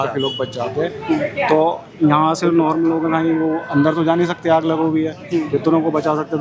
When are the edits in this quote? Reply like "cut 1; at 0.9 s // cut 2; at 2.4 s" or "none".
none